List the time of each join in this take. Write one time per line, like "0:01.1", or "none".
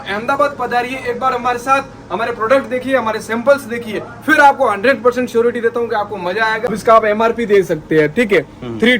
0:06.7

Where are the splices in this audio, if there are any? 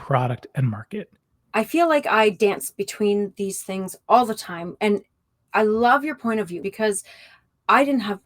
0:01.3
0:06.6

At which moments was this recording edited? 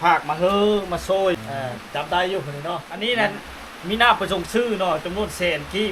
0:01.4
0:02.9

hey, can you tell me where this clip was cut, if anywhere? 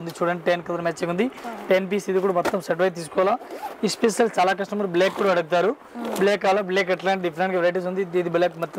none

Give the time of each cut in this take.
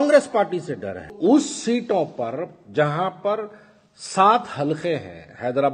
0:01.1

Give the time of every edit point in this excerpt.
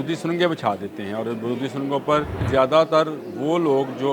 0:02.5

